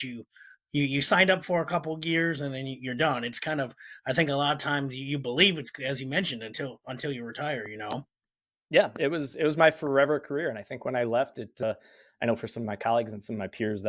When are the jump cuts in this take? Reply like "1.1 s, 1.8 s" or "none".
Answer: 11.6 s